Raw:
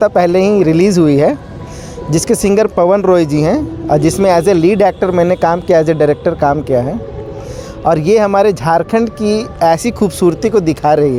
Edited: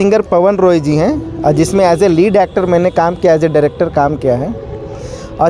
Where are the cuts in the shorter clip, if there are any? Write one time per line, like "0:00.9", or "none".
none